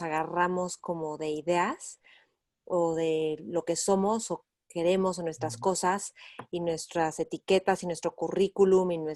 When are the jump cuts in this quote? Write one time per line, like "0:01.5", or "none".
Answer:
none